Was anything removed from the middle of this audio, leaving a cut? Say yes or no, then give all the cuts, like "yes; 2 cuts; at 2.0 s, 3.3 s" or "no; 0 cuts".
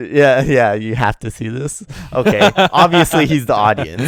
no; 0 cuts